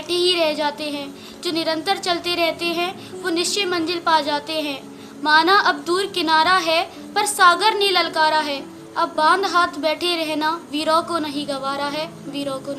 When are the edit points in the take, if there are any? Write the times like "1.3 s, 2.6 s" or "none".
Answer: none